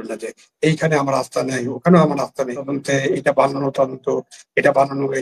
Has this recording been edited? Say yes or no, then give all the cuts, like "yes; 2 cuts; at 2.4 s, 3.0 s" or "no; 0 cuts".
yes; 1 cut; at 2.7 s